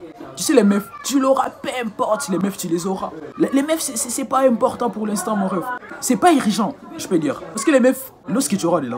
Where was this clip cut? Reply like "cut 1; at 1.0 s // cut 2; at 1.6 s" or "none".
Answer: cut 1; at 6.0 s